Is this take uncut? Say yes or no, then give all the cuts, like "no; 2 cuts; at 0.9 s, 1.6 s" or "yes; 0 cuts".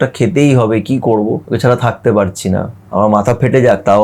no; 1 cut; at 1.4 s